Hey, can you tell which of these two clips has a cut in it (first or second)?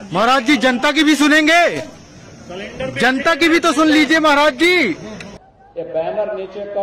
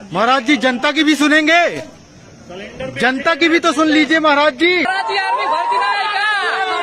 second